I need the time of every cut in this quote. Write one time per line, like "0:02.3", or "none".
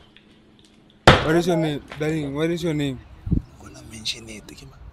0:01.2

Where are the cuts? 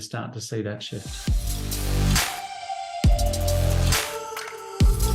0:01.1

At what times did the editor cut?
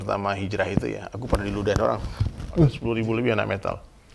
0:02.8

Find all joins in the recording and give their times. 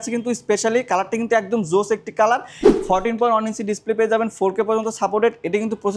0:02.6

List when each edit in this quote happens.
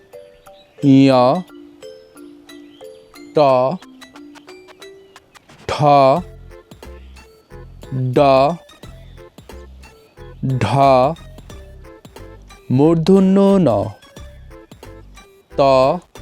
0:01.8
0:03.3
0:04.1
0:05.6
0:08.8
0:10.4

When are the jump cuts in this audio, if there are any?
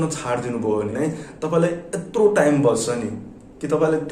0:00.9

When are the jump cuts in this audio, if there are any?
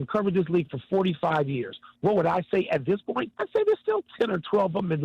0:03.3

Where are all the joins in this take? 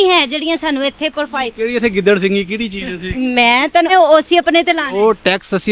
0:03.9

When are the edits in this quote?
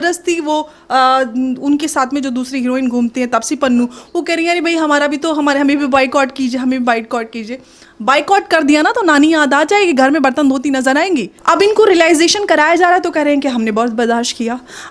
0:11.3

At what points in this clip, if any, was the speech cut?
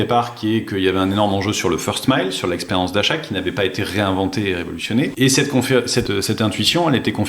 0:05.1
0:06.1

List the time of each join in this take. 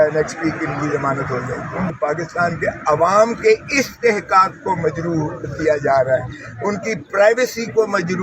0:01.9

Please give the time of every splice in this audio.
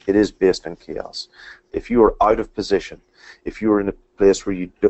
0:01.6

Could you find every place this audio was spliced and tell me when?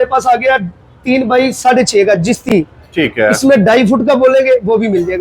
none

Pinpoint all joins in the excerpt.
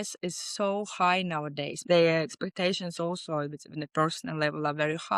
0:01.8

